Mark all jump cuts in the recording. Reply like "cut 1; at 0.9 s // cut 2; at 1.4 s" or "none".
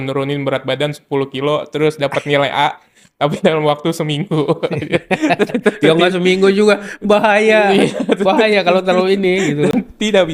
none